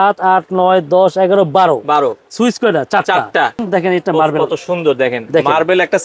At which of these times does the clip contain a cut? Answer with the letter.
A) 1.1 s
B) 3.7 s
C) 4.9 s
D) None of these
B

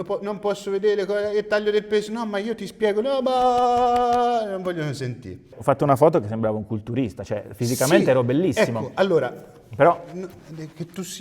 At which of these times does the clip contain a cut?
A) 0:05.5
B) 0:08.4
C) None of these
A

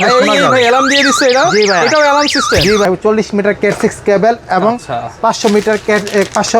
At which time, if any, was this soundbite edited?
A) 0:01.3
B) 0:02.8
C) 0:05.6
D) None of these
B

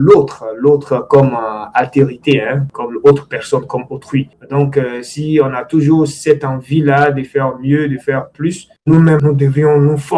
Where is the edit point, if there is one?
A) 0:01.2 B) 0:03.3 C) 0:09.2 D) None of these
C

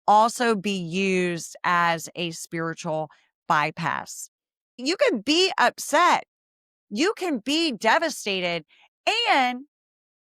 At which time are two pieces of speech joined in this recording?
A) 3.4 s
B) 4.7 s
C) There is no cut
B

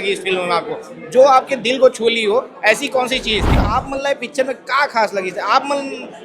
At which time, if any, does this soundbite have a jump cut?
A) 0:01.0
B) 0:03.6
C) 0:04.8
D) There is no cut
B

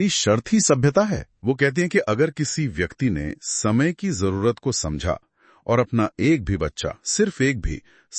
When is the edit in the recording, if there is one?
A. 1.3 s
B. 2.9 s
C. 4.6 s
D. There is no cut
A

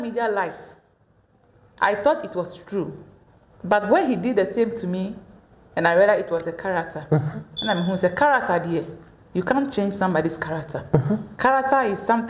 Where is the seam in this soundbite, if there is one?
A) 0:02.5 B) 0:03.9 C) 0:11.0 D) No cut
D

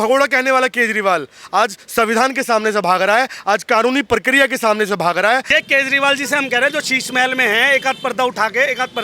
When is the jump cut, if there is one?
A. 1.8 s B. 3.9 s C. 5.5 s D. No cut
C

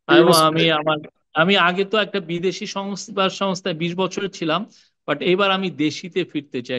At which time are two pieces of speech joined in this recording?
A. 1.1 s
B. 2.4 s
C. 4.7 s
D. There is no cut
D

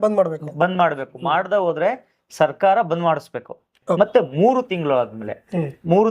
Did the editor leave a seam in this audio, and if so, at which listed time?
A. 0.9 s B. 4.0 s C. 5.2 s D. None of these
B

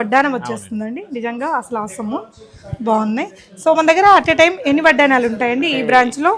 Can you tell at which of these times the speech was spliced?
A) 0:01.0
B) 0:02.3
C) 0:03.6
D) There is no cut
D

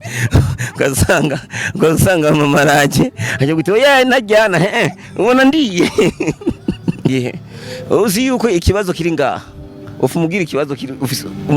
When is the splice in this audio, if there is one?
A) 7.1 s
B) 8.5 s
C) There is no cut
A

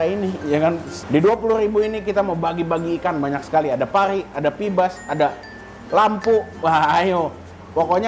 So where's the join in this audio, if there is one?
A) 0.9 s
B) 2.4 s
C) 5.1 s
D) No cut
A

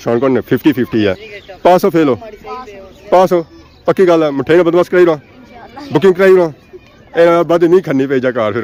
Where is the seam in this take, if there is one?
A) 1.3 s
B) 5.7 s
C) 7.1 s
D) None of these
D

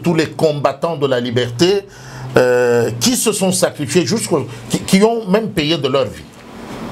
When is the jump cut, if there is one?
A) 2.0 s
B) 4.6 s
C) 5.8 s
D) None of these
D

